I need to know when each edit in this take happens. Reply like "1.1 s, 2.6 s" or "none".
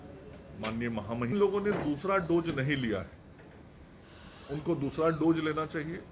1.3 s